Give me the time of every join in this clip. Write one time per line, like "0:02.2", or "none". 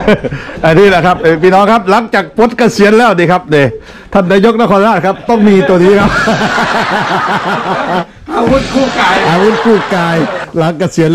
none